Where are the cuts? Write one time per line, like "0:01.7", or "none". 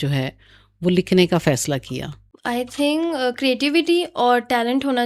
none